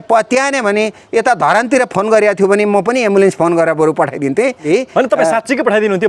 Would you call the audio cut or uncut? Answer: cut